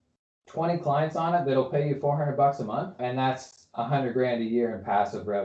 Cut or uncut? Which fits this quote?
uncut